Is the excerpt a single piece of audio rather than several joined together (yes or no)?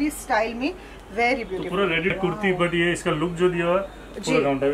no